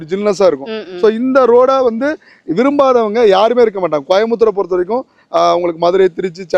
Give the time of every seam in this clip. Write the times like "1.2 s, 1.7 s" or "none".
none